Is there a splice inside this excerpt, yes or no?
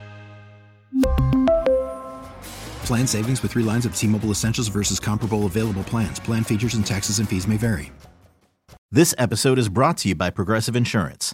yes